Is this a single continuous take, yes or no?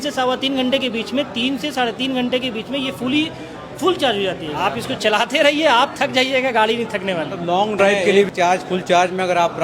no